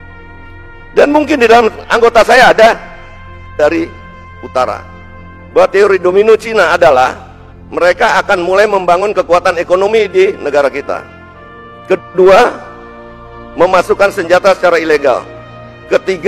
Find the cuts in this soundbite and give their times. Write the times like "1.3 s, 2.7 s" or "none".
3.5 s